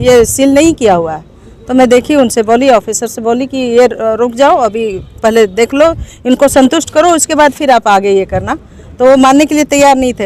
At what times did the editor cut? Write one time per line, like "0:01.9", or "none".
none